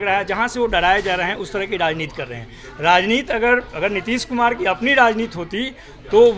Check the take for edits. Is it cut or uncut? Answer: uncut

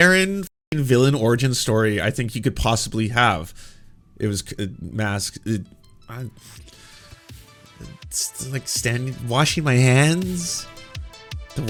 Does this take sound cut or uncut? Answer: uncut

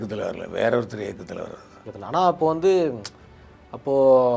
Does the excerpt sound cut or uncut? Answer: cut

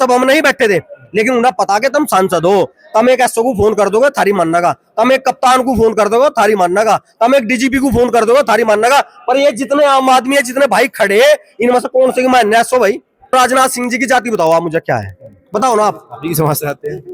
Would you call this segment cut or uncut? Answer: cut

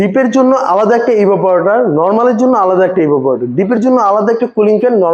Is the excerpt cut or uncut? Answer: uncut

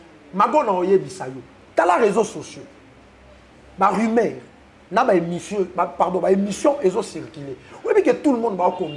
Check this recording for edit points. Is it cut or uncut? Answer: uncut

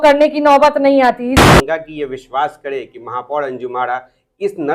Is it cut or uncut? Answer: cut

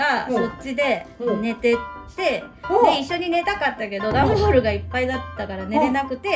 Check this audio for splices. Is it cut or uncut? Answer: uncut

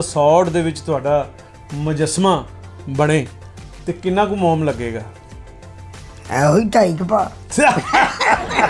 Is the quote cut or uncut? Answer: uncut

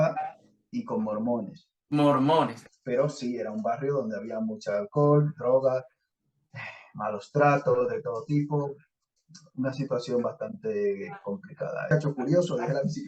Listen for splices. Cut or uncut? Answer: cut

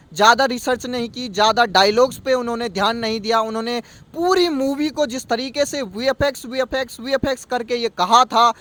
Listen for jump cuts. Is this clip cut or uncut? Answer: uncut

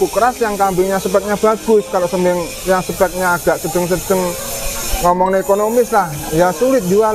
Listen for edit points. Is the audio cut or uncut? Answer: uncut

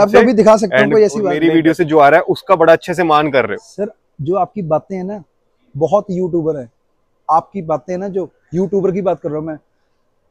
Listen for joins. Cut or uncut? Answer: cut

